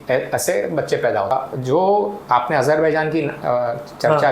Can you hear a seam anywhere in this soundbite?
yes; 1 cut; at 1.3 s

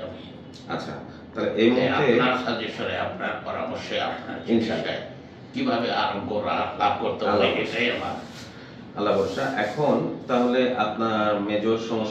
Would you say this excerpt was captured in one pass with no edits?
yes; 0 cuts

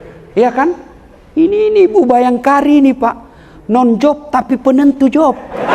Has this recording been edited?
no; 0 cuts

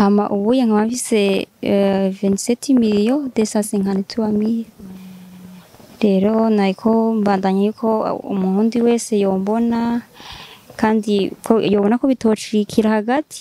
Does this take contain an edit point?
no; 0 cuts

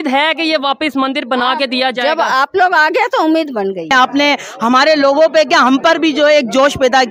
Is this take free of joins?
no; 1 cut; at 3.9 s

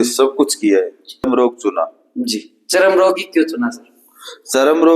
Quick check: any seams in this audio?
yes; 1 cut; at 1.2 s

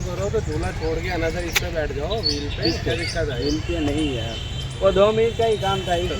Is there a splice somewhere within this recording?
yes; 1 cut; at 1.1 s

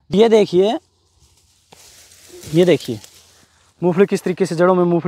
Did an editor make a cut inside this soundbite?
no; 0 cuts

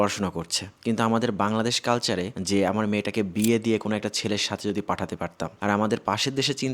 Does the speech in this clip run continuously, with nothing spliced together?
no; 2 cuts; at 2.4 s, 5.6 s

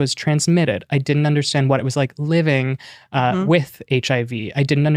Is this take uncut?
yes; 0 cuts

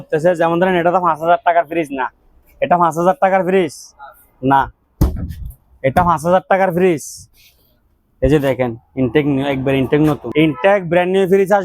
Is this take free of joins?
no; 1 cut; at 10.2 s

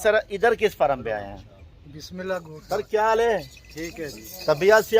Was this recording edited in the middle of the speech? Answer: yes; 1 cut; at 2.5 s

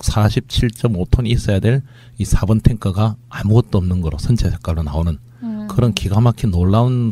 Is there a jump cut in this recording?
yes; 1 cut; at 3.2 s

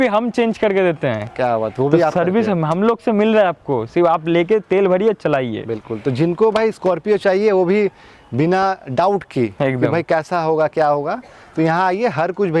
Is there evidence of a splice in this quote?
no; 0 cuts

